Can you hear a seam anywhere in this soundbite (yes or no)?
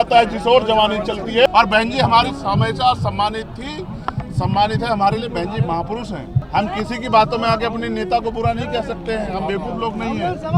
yes